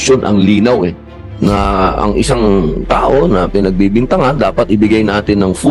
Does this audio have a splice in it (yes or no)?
no